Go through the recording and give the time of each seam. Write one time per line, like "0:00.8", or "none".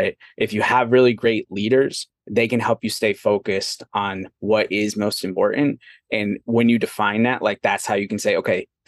none